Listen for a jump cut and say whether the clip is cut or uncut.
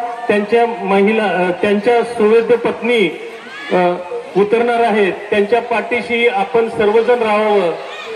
uncut